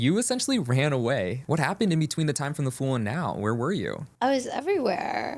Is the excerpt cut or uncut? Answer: cut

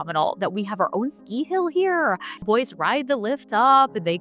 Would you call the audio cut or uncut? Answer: uncut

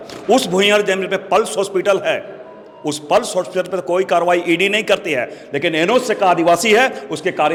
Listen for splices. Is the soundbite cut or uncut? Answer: uncut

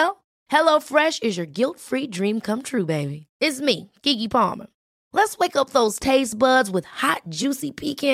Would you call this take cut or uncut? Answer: uncut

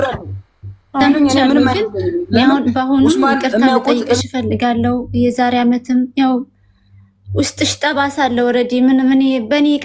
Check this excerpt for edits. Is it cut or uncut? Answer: cut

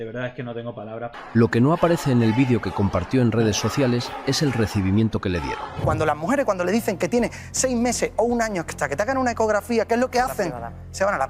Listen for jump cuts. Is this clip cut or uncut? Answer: cut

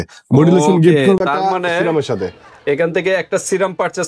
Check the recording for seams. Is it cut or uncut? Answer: uncut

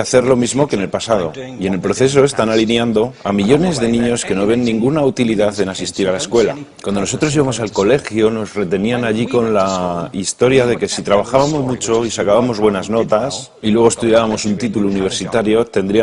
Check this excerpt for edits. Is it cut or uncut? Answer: uncut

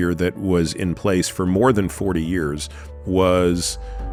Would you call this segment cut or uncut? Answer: uncut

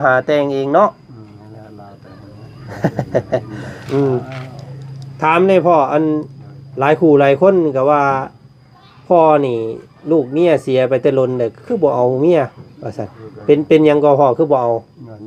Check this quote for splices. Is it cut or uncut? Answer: cut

